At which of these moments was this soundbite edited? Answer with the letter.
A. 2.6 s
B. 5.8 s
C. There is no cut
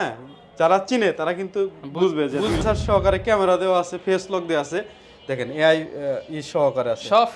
A